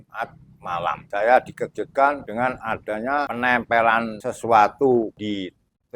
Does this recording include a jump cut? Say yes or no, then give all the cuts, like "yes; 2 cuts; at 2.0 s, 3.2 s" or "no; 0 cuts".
yes; 5 cuts; at 1.0 s, 2.2 s, 3.3 s, 4.2 s, 5.2 s